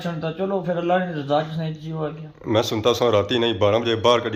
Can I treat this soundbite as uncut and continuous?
yes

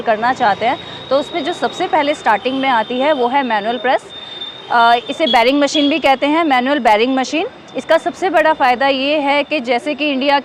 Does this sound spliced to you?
no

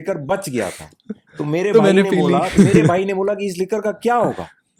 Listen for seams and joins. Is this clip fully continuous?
yes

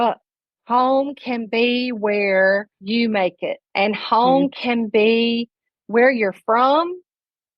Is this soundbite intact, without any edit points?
no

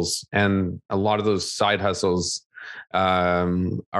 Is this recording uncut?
yes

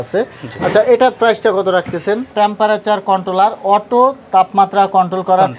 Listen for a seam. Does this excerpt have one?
yes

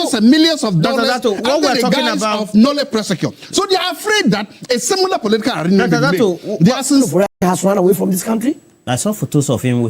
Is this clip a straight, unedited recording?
no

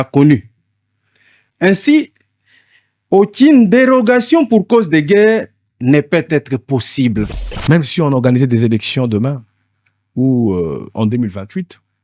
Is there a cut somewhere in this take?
yes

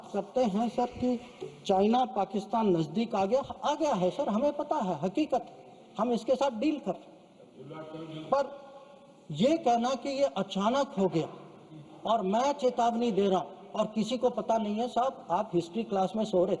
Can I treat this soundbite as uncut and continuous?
yes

